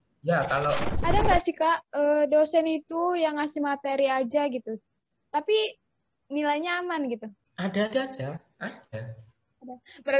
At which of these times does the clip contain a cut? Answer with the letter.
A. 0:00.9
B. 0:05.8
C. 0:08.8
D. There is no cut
A